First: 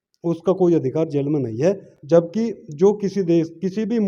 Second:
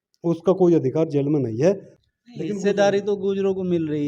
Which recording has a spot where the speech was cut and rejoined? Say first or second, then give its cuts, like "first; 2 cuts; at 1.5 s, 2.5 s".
second; 1 cut; at 1.9 s